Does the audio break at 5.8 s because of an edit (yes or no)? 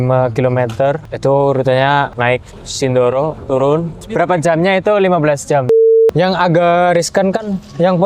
yes